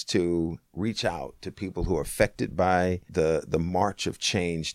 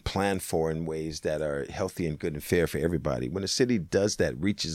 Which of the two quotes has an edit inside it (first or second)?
first